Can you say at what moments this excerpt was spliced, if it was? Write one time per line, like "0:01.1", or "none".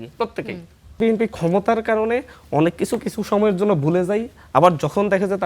0:01.0